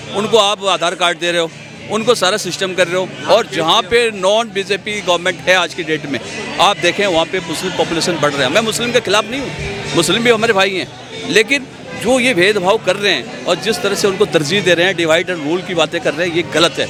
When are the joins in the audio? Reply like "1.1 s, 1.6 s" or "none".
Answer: none